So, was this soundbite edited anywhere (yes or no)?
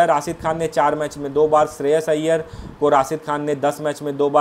no